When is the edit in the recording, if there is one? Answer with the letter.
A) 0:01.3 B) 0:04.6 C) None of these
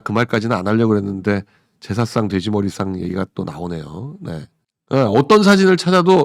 C